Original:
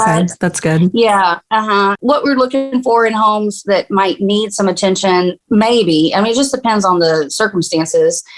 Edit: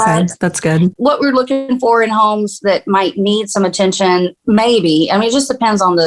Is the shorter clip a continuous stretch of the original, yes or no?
no